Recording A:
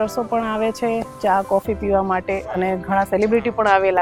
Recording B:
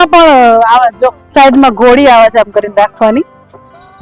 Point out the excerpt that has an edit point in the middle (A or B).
B